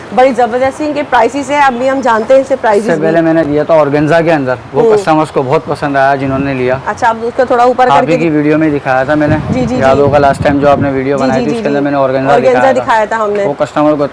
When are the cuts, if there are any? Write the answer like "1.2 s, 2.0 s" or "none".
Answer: none